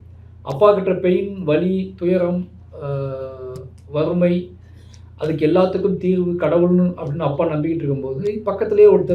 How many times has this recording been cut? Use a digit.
0